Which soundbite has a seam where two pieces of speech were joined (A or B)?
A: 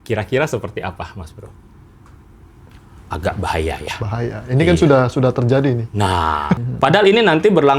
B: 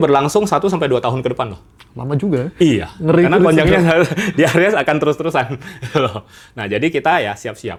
A